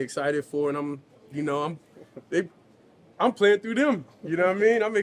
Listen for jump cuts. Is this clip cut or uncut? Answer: uncut